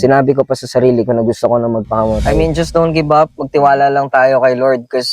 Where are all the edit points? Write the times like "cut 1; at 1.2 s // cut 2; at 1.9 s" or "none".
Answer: cut 1; at 2.3 s